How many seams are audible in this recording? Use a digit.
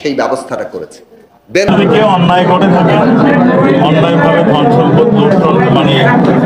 1